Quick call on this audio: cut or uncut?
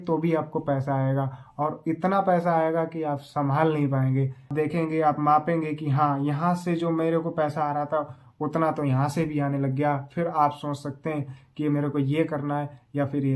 cut